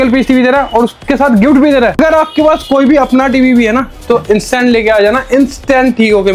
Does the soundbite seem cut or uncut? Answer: cut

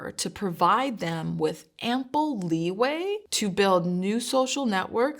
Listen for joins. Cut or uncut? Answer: cut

